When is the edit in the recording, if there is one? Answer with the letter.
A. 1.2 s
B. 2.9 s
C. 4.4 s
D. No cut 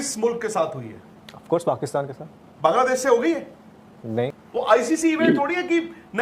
C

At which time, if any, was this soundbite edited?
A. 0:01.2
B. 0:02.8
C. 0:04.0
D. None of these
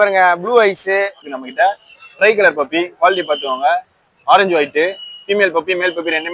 A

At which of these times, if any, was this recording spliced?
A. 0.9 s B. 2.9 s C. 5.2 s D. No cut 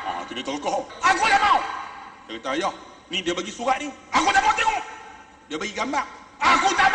A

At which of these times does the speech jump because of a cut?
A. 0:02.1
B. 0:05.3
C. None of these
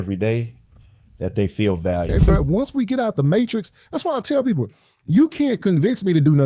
A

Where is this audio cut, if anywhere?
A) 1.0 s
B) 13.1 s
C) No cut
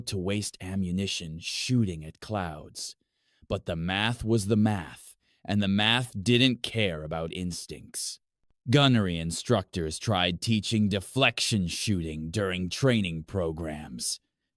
A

